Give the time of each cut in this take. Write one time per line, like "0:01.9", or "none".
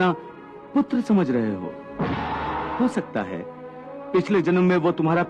0:02.7